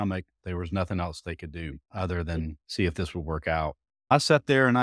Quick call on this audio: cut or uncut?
cut